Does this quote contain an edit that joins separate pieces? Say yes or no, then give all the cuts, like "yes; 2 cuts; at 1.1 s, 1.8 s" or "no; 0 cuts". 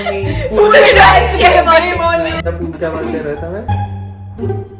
yes; 1 cut; at 2.4 s